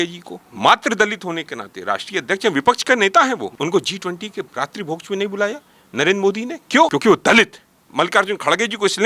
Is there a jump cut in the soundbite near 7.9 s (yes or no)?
yes